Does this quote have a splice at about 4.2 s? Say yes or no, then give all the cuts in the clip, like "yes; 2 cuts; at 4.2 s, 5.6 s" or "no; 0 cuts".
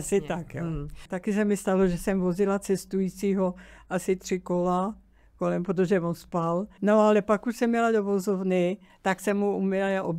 no; 3 cuts; at 1.1 s, 6.7 s, 8.9 s